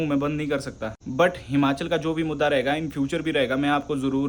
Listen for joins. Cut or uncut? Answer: uncut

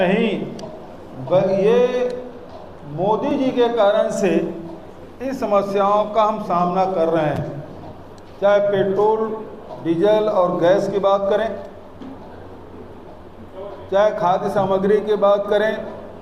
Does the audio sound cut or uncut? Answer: uncut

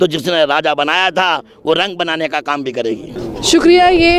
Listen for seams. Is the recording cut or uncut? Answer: uncut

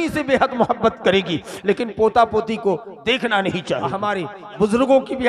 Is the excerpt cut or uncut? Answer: cut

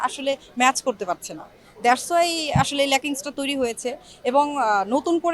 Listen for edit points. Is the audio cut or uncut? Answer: uncut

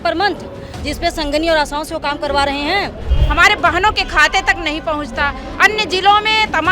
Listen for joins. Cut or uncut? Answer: cut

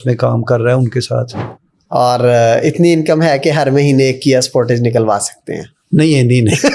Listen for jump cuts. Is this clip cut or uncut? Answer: cut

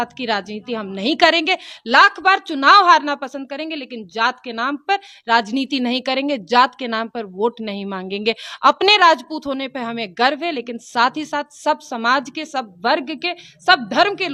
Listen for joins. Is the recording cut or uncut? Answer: uncut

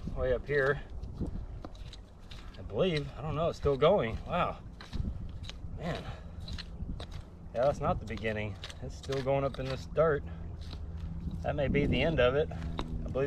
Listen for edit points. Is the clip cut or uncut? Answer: uncut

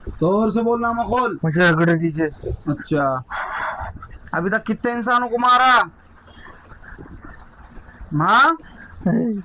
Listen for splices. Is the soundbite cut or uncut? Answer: uncut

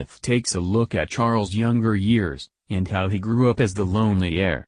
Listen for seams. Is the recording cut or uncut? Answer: uncut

